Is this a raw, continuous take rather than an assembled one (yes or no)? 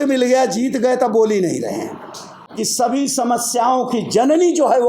no